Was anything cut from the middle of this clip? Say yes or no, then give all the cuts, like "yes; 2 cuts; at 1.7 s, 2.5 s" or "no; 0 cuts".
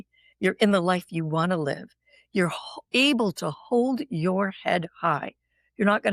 no; 0 cuts